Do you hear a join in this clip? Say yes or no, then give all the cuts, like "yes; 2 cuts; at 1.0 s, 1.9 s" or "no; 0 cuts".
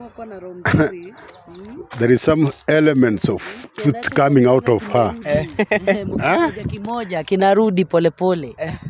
no; 0 cuts